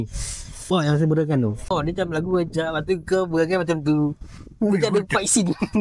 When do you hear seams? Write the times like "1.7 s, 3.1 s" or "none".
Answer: 1.7 s